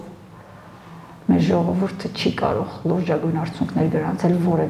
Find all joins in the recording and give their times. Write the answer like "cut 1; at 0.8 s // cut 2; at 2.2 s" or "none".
none